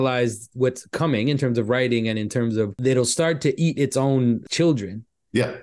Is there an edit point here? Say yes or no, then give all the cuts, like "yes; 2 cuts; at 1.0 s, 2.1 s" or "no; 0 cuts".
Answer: yes; 2 cuts; at 2.8 s, 4.5 s